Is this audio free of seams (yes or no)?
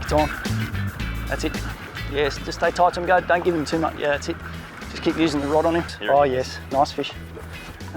no